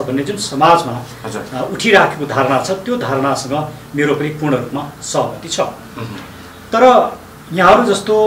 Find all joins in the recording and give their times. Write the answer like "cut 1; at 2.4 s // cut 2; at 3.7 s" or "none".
none